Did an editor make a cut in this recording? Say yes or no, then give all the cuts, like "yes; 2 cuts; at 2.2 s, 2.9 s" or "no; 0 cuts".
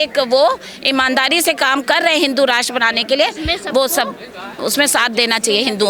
no; 0 cuts